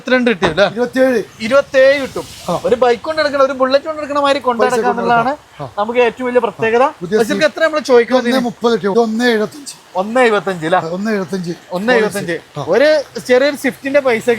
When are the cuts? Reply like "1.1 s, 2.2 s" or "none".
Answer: 8.9 s